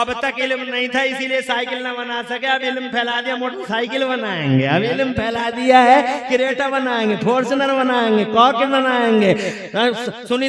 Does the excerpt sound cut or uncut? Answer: uncut